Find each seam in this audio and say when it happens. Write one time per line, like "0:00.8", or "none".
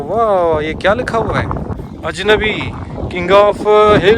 0:01.9